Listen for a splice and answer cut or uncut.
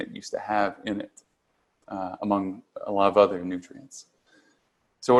uncut